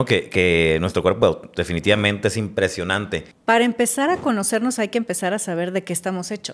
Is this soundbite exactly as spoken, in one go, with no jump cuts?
no; 1 cut; at 3.3 s

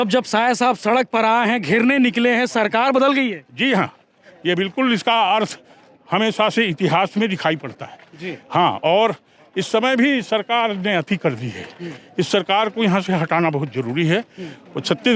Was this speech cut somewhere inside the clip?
no; 0 cuts

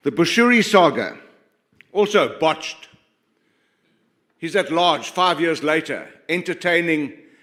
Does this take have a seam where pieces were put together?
no; 0 cuts

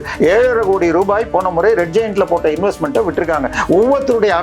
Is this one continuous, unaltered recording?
yes; 0 cuts

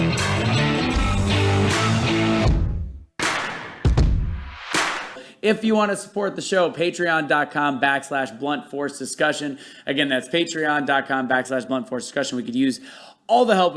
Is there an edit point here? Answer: yes; 1 cut; at 5.3 s

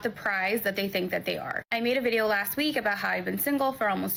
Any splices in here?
no; 0 cuts

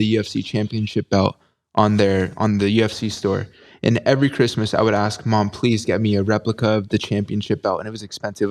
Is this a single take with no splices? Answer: yes; 0 cuts

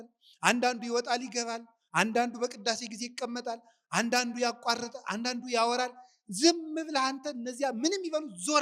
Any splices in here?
no; 0 cuts

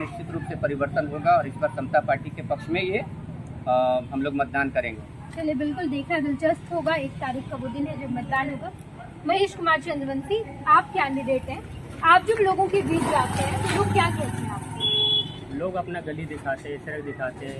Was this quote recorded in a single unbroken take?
yes; 0 cuts

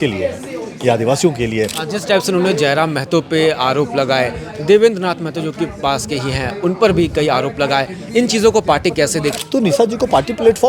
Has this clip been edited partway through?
yes; 2 cuts; at 1.8 s, 9.3 s

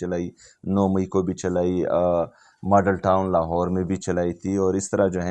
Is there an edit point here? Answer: no; 0 cuts

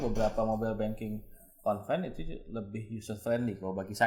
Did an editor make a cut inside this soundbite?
no; 0 cuts

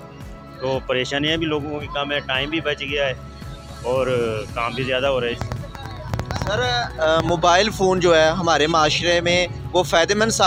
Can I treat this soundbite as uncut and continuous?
yes; 0 cuts

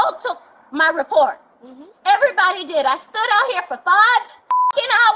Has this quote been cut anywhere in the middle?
no; 0 cuts

